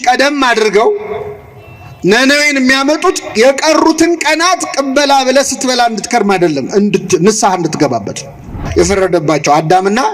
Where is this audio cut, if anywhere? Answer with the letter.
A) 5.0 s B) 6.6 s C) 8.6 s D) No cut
C